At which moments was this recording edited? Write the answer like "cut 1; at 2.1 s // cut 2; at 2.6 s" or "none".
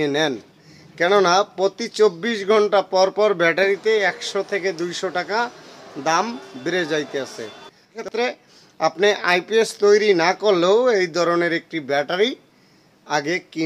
cut 1; at 8.0 s